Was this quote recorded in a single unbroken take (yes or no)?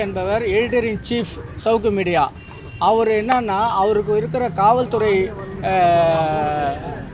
yes